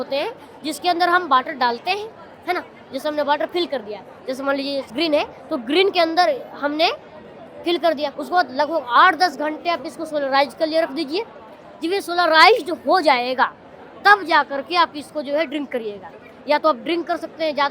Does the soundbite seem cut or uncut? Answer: cut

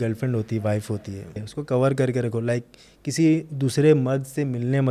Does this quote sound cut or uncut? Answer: cut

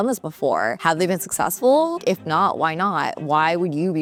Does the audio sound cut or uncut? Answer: uncut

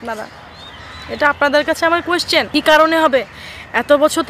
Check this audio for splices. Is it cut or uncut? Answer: cut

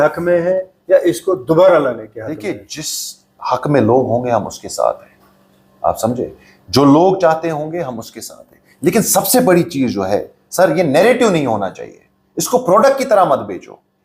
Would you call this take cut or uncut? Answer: uncut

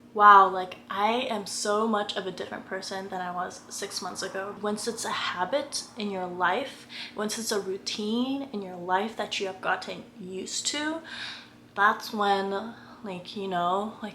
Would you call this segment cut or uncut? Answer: cut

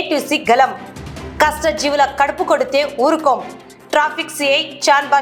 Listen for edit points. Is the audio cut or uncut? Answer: uncut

